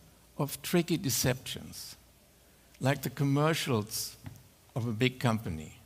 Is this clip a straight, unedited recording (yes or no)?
no